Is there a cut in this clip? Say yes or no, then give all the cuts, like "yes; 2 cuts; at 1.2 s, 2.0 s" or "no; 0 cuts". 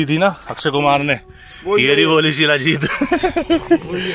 no; 0 cuts